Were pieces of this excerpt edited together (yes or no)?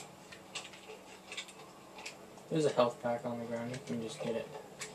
no